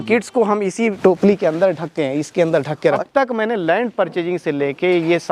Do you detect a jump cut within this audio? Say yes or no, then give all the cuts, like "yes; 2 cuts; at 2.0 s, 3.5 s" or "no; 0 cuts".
yes; 2 cuts; at 1.0 s, 3.1 s